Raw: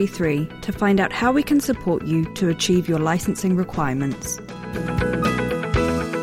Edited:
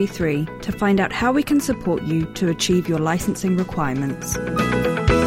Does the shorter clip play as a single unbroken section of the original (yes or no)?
no